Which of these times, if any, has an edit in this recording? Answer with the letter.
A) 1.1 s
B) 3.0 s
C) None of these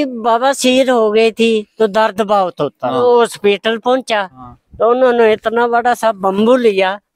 B